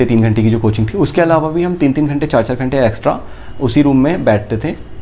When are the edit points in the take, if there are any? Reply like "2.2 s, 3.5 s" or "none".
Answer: none